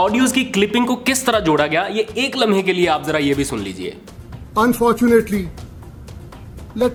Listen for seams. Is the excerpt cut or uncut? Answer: uncut